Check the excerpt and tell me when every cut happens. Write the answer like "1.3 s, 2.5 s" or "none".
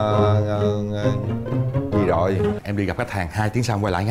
2.6 s